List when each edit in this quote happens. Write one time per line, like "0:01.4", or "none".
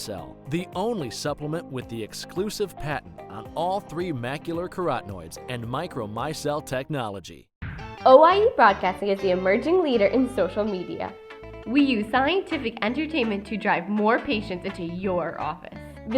0:07.6